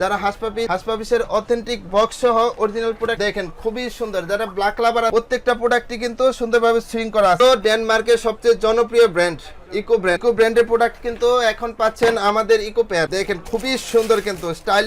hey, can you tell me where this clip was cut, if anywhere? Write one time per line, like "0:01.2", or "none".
0:07.4
0:10.2
0:13.1